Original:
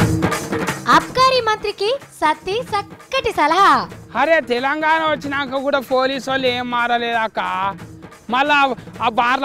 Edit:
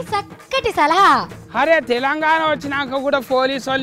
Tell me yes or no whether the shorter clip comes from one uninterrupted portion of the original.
yes